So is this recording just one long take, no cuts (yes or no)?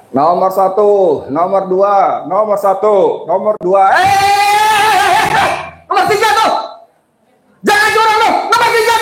yes